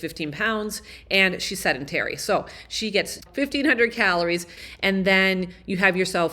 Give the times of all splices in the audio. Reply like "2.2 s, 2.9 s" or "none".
3.2 s, 4.6 s

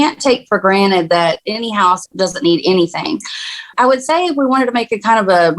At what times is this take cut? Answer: 1.5 s

